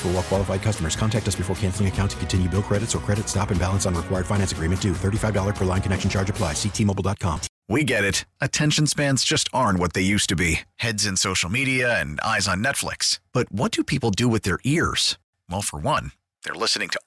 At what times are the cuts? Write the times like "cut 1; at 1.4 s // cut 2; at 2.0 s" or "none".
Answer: cut 1; at 7.5 s